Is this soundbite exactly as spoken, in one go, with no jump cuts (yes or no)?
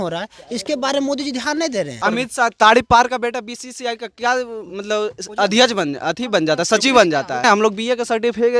no